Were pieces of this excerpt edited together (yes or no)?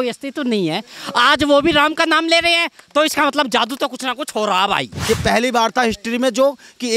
yes